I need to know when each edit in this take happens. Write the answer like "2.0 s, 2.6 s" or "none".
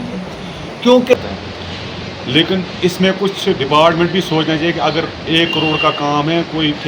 1.1 s